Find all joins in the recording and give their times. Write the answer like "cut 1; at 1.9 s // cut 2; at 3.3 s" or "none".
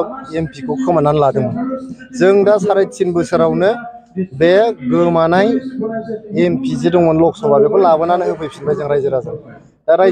none